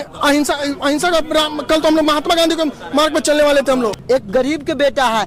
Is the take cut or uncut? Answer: cut